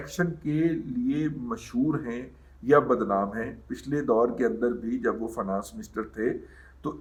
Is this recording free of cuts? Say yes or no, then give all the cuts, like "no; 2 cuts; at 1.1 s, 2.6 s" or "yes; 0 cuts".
yes; 0 cuts